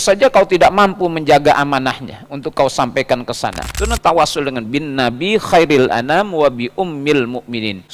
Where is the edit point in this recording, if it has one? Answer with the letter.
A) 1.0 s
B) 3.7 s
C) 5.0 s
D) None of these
B